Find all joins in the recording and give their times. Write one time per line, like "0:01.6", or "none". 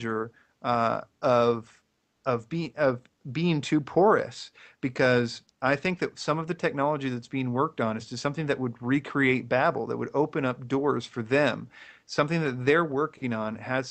none